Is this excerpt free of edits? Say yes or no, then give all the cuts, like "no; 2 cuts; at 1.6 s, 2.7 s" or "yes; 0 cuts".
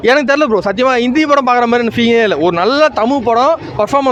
yes; 0 cuts